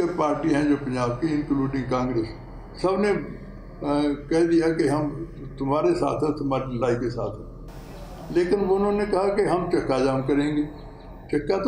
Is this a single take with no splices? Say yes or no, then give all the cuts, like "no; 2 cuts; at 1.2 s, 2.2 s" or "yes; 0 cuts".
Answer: yes; 0 cuts